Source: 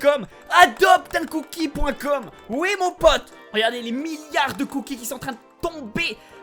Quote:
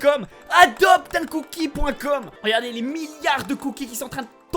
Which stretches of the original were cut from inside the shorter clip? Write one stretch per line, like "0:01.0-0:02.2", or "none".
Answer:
0:02.3-0:03.4